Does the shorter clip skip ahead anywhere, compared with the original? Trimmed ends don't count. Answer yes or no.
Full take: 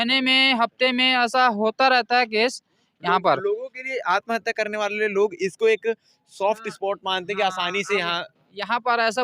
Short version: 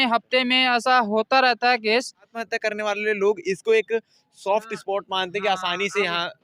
yes